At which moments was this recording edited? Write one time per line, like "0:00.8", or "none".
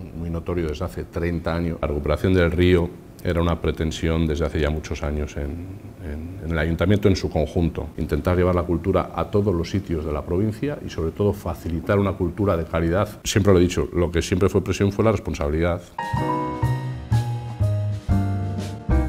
0:01.8
0:07.9
0:13.2
0:15.9